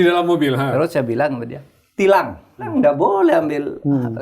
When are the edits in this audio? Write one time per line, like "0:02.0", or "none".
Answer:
0:02.7